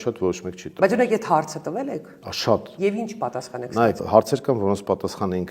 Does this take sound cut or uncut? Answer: cut